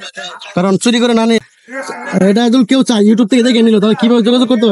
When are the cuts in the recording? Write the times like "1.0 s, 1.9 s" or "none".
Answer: 1.5 s